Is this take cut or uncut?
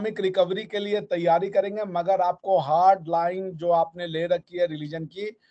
uncut